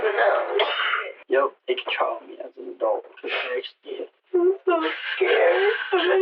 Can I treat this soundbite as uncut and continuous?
no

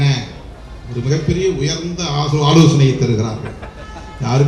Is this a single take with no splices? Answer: yes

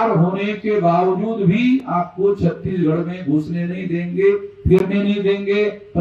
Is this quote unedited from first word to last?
yes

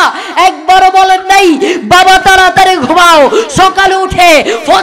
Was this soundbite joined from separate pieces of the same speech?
no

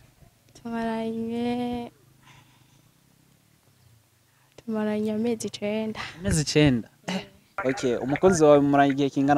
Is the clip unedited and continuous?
no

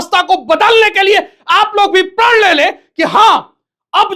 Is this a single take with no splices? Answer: yes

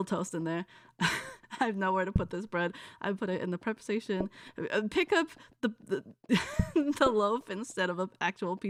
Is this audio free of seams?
yes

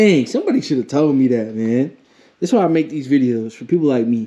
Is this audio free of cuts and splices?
yes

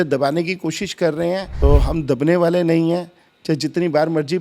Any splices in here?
yes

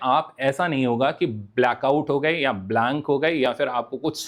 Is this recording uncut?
yes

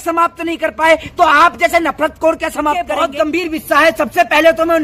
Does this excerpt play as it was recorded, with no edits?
no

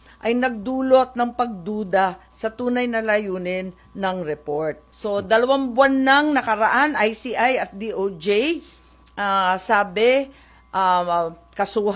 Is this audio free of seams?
no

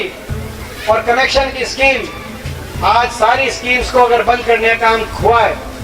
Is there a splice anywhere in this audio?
no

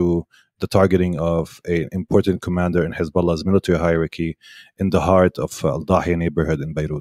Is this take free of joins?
yes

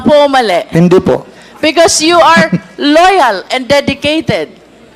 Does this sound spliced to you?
no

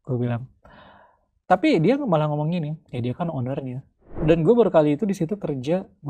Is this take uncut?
no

